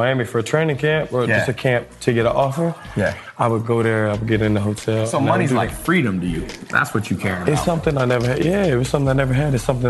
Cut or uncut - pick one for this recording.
uncut